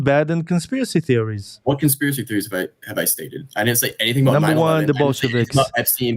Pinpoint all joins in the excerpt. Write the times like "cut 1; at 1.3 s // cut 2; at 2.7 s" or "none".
cut 1; at 1.4 s